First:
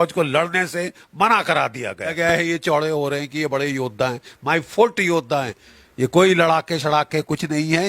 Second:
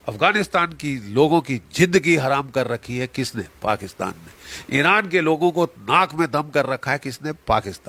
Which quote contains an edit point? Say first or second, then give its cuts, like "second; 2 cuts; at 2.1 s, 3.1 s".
first; 2 cuts; at 2.1 s, 5.6 s